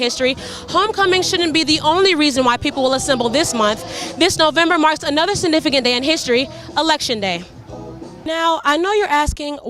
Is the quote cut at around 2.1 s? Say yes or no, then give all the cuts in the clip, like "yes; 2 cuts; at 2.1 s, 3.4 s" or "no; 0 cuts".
no; 1 cut; at 8.3 s